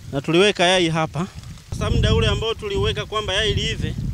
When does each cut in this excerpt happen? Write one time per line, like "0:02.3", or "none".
0:01.7